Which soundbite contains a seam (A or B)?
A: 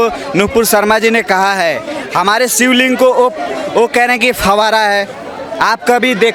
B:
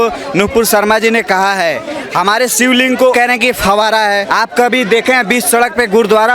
B